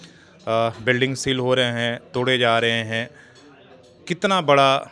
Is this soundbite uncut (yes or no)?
yes